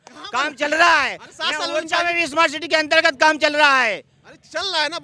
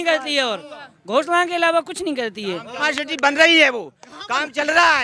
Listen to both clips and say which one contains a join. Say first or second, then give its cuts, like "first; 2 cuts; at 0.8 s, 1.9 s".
second; 1 cut; at 3.0 s